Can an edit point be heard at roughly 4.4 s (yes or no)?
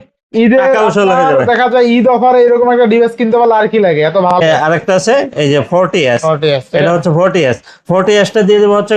yes